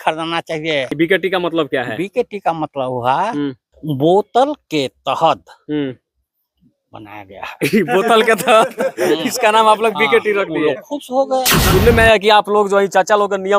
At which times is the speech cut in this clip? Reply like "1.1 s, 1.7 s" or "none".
0.9 s, 3.7 s, 11.6 s